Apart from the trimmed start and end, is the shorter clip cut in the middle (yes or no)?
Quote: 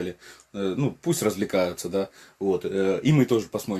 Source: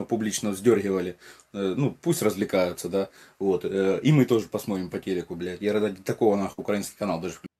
no